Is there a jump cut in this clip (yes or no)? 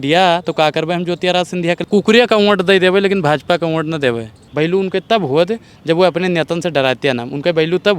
yes